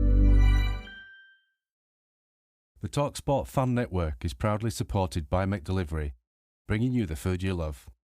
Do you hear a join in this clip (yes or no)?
yes